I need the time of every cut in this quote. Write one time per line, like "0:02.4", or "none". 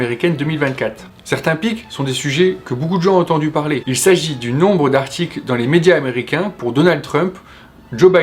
0:01.1
0:03.9